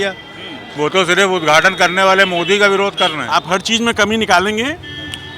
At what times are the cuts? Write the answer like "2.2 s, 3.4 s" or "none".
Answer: 3.2 s